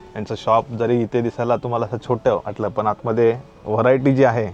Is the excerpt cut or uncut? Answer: uncut